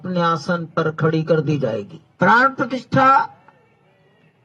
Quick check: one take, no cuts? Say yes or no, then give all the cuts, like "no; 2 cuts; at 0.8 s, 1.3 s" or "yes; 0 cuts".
no; 1 cut; at 2.0 s